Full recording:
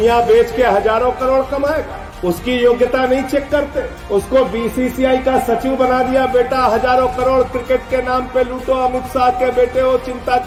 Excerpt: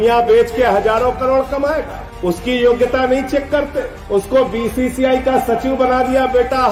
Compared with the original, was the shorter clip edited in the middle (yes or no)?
no